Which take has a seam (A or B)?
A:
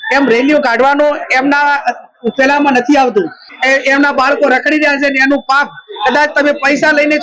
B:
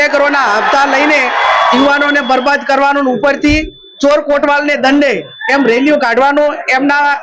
A